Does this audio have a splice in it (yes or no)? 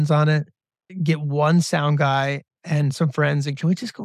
no